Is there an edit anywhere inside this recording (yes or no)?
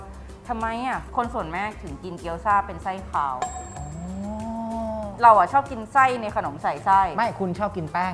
no